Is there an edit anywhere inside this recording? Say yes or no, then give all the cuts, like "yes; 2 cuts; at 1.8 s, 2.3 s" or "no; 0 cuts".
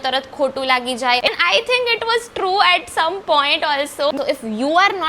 yes; 2 cuts; at 1.3 s, 4.1 s